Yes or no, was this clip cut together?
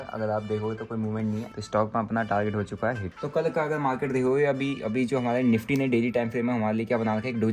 yes